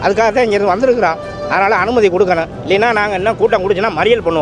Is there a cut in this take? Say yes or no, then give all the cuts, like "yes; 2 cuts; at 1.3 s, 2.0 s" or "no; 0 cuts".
no; 0 cuts